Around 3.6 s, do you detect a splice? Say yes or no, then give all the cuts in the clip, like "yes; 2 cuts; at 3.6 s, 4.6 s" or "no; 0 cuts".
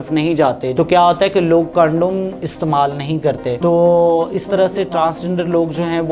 yes; 2 cuts; at 0.7 s, 3.6 s